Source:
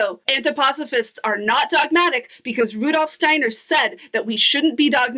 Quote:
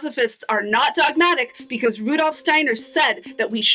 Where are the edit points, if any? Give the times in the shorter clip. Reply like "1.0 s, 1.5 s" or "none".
none